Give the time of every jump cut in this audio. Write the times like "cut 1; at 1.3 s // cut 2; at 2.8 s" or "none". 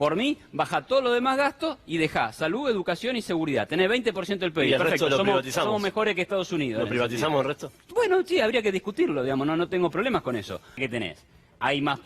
cut 1; at 10.8 s